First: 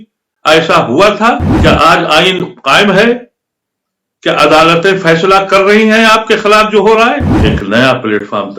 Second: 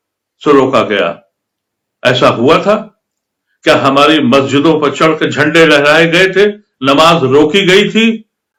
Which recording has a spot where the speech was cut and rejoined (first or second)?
first